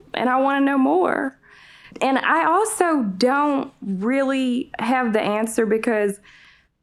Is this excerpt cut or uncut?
uncut